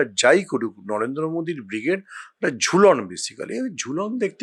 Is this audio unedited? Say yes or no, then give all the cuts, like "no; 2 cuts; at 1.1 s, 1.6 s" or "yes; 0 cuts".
yes; 0 cuts